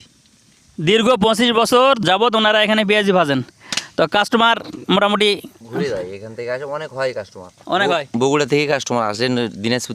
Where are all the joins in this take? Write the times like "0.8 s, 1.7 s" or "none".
2.0 s